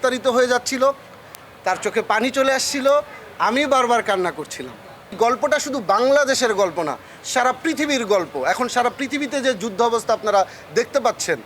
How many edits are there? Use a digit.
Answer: 1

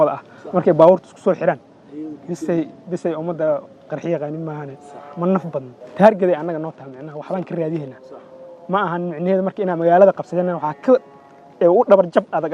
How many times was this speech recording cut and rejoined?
1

